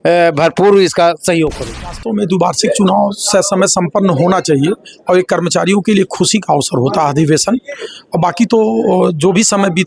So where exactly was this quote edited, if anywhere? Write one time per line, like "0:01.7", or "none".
0:02.0